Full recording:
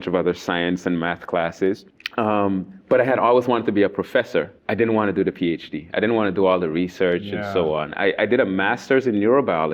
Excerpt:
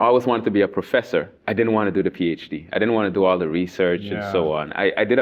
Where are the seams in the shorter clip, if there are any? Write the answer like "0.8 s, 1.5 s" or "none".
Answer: none